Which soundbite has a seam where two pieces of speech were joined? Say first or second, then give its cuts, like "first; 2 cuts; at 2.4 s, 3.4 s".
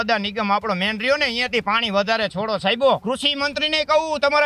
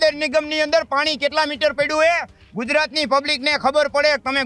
first; 1 cut; at 3.0 s